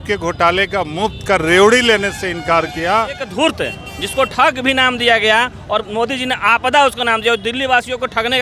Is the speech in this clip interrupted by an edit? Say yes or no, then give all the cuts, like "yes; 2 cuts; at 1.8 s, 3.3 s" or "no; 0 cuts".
yes; 1 cut; at 3.3 s